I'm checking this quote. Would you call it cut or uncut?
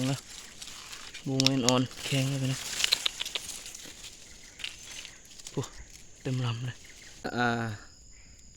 cut